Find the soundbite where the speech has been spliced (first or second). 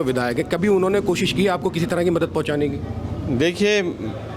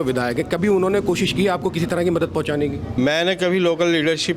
second